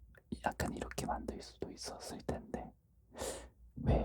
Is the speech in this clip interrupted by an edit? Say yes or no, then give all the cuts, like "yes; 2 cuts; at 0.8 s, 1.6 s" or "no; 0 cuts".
no; 0 cuts